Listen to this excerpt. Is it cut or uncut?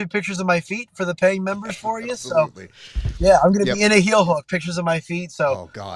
uncut